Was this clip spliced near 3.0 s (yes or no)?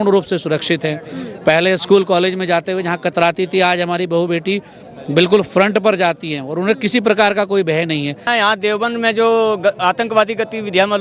no